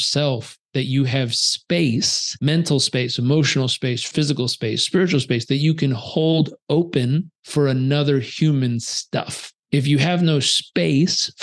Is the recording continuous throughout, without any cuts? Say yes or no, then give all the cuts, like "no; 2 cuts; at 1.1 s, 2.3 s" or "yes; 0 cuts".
no; 3 cuts; at 2.2 s, 4.1 s, 7.4 s